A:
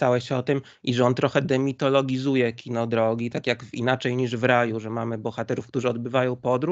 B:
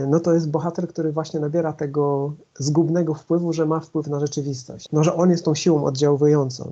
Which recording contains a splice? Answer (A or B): B